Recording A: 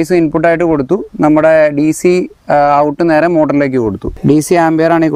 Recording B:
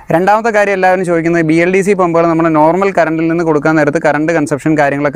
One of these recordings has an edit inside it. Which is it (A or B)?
A